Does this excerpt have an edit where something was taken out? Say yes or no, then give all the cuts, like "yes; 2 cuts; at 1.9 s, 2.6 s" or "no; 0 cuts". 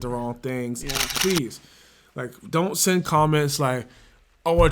yes; 1 cut; at 1.1 s